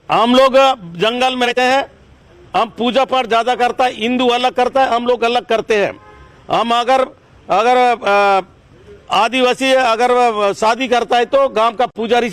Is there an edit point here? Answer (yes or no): yes